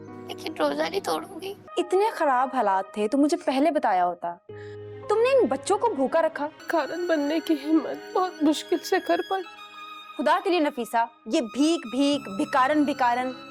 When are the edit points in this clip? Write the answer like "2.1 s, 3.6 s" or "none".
1.6 s, 6.6 s